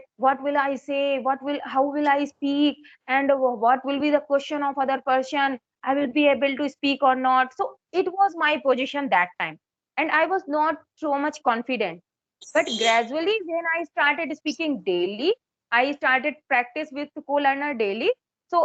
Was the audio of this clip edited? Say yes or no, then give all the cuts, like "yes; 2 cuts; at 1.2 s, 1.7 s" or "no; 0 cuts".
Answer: no; 0 cuts